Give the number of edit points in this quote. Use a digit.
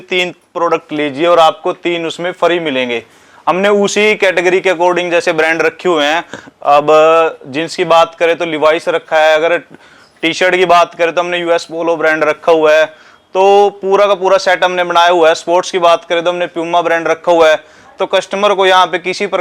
0